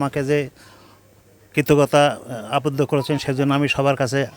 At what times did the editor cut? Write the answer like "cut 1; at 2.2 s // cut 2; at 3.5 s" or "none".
none